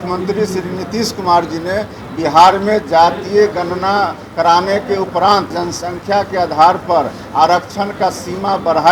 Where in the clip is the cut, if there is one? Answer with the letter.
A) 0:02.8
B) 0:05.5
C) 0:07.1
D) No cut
B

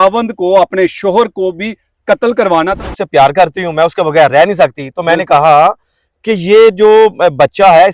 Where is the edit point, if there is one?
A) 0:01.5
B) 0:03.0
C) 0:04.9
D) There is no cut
B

